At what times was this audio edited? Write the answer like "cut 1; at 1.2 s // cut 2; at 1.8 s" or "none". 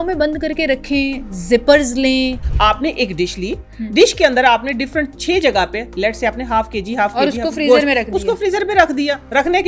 cut 1; at 2.4 s